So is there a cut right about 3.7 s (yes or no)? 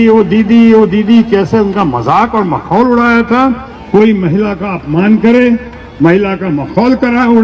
yes